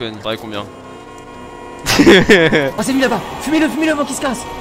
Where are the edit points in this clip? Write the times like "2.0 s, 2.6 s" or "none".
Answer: 2.8 s

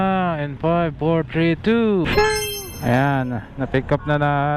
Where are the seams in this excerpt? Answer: 2.1 s

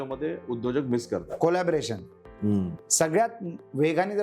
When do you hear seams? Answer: 1.3 s, 2.8 s

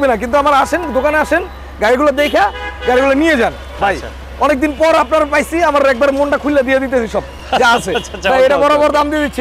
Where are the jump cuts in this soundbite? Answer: none

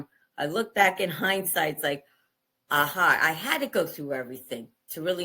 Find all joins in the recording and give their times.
none

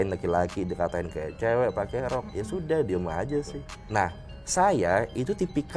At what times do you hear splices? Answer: 3.8 s

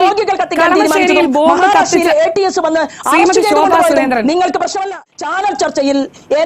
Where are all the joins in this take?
5.0 s

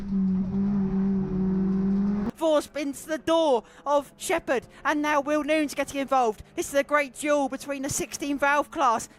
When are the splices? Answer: 2.3 s

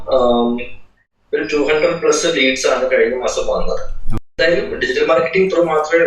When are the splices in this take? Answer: 4.4 s

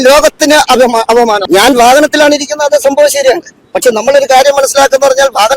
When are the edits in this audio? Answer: 1.4 s

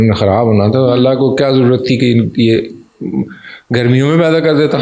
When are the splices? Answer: none

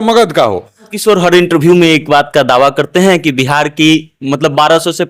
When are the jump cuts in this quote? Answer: 0.9 s

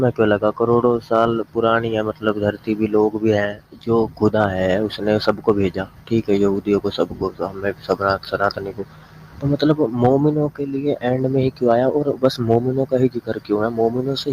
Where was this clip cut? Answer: 3.7 s

